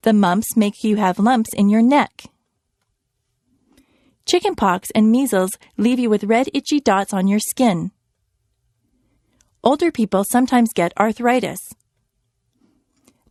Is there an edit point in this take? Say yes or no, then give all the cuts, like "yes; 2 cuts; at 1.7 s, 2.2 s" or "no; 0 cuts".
no; 0 cuts